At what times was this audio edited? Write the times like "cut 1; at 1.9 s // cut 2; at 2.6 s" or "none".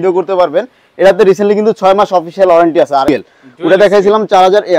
cut 1; at 3.1 s